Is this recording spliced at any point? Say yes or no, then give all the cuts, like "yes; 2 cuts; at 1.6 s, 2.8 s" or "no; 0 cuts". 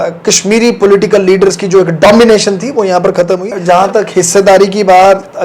yes; 1 cut; at 3.6 s